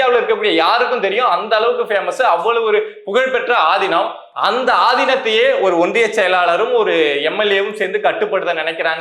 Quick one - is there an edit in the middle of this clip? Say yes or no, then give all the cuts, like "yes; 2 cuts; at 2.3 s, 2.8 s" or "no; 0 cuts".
no; 0 cuts